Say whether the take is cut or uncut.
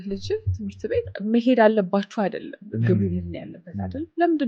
cut